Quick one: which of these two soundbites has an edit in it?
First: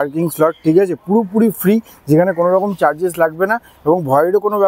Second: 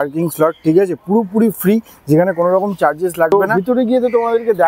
second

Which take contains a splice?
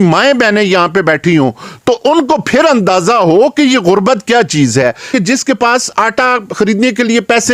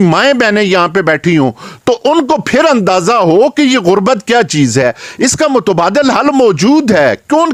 first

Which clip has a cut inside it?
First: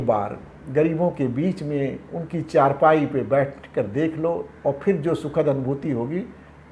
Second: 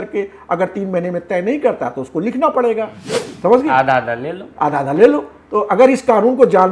second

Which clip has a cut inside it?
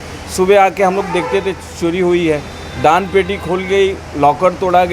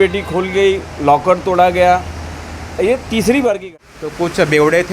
second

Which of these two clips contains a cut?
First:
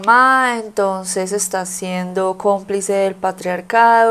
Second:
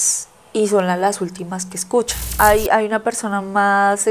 second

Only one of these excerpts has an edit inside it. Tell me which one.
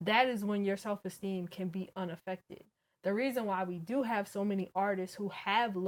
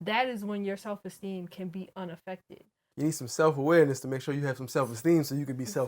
second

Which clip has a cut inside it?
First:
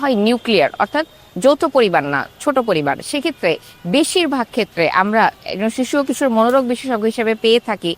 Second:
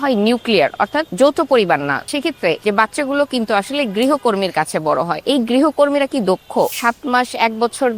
second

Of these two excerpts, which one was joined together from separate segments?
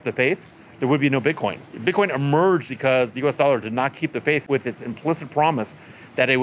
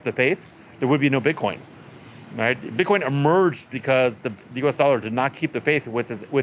first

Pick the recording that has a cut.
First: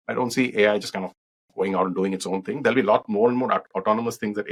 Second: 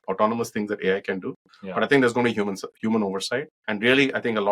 second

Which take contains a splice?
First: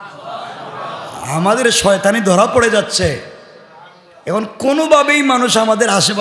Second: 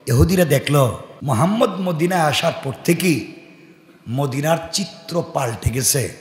second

